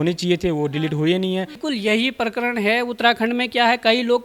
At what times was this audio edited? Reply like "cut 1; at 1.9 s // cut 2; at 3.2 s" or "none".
cut 1; at 1.6 s